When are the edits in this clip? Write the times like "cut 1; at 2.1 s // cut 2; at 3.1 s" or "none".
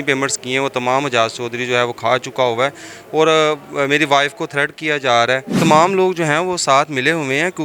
cut 1; at 5.6 s